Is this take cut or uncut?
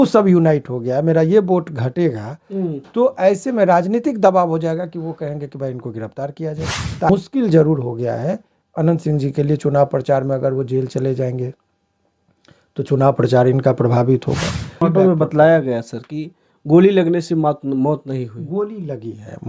cut